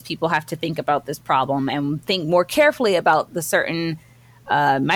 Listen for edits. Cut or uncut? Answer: uncut